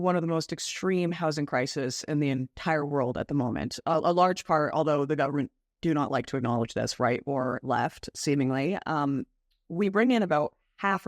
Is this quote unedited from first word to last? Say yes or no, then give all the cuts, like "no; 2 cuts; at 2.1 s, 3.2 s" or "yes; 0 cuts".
no; 1 cut; at 3.7 s